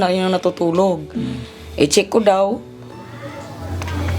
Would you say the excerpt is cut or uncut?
uncut